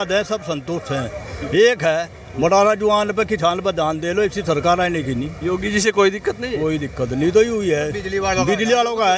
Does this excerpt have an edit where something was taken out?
no; 0 cuts

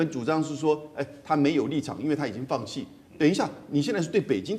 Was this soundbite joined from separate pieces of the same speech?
no; 0 cuts

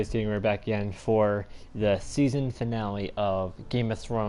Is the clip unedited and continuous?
no; 1 cut; at 1.4 s

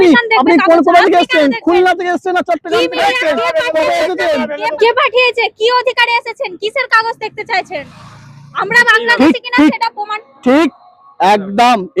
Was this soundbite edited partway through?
yes; 1 cut; at 4.8 s

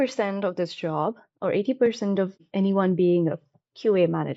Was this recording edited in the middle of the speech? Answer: yes; 1 cut; at 2.4 s

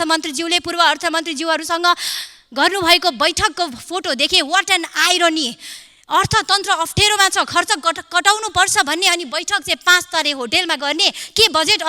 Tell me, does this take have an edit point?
no; 0 cuts

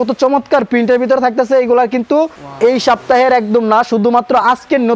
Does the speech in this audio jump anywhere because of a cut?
yes; 1 cut; at 2.4 s

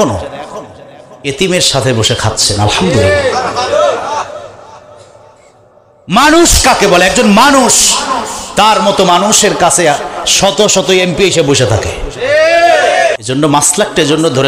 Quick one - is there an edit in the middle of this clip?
yes; 1 cut; at 13.2 s

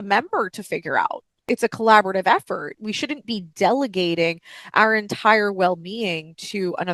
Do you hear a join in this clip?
yes; 1 cut; at 1.5 s

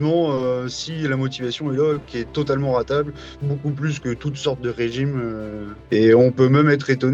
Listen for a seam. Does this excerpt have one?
yes; 2 cuts; at 2.1 s, 5.7 s

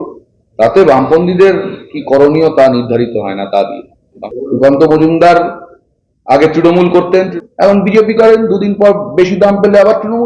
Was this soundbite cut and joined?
yes; 2 cuts; at 4.2 s, 7.3 s

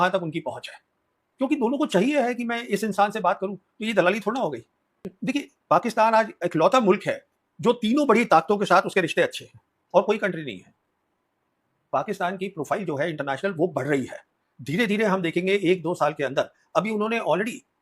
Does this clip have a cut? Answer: yes; 2 cuts; at 5.0 s, 11.7 s

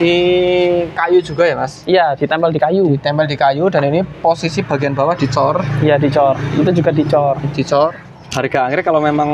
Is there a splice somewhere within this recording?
yes; 1 cut; at 8.0 s

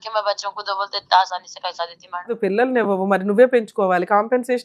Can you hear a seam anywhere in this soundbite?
yes; 1 cut; at 2.3 s

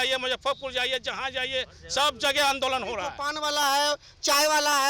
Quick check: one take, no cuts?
no; 1 cut; at 3.2 s

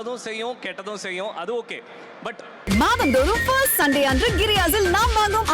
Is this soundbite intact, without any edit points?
no; 1 cut; at 2.5 s

